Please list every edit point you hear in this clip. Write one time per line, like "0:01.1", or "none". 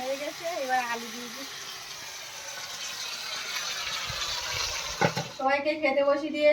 0:05.6